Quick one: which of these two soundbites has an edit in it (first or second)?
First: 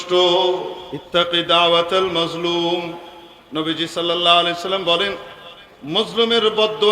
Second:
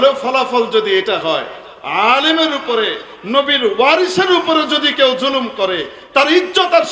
first